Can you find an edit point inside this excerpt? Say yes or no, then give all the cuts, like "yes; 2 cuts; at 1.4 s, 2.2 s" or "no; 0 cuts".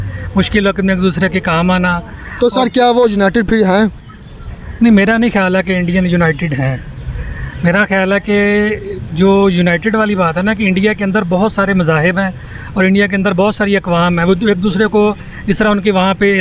no; 0 cuts